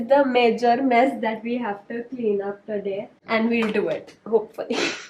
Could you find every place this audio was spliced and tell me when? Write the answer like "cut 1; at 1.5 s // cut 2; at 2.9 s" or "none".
none